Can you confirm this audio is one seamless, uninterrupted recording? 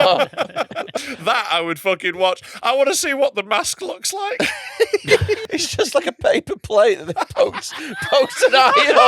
no; 2 cuts; at 1.0 s, 5.4 s

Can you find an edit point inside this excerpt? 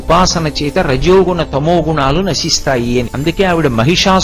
yes; 1 cut; at 3.1 s

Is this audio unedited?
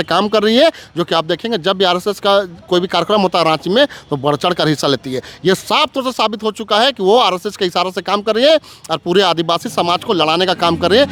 yes; 0 cuts

